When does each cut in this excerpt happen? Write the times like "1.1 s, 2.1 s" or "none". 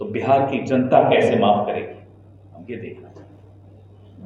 none